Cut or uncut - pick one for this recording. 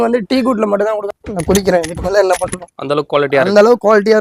cut